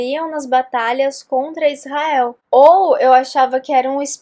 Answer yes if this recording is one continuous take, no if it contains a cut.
no